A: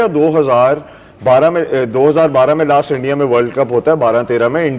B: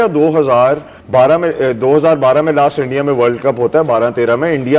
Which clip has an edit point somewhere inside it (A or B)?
B